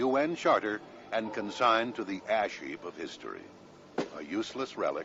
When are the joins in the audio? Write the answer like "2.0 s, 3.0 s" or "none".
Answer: none